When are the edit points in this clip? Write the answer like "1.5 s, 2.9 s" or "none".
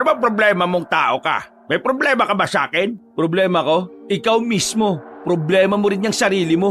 1.5 s, 3.0 s, 3.9 s, 5.1 s